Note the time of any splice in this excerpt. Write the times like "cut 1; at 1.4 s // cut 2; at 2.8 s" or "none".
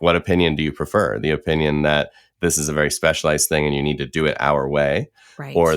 none